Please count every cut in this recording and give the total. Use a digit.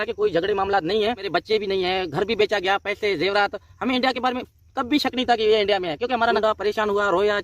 2